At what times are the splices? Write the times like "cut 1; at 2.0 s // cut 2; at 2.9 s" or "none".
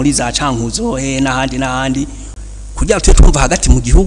cut 1; at 2.2 s